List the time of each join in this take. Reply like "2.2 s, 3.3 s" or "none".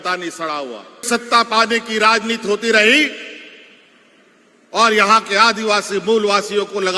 1.0 s